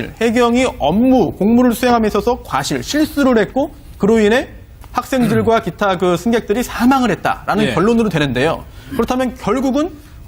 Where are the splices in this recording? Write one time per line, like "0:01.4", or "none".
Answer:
0:06.1